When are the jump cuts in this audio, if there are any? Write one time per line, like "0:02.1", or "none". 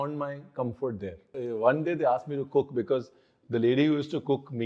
0:01.4